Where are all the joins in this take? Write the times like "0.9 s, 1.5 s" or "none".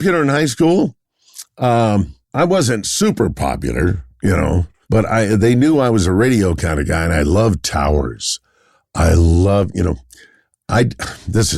2.2 s